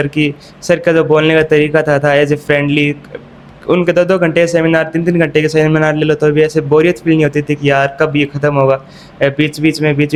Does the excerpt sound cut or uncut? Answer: uncut